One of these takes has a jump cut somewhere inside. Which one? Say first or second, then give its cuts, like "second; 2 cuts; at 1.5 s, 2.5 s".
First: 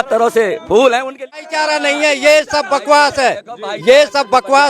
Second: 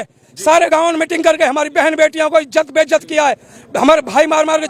first; 1 cut; at 1.4 s